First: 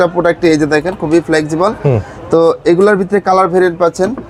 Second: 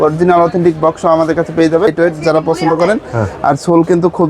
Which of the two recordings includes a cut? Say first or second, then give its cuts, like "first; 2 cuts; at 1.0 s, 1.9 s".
second; 1 cut; at 1.9 s